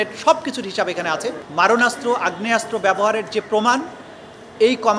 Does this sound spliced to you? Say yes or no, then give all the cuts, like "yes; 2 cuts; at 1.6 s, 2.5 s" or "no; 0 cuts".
yes; 1 cut; at 1.4 s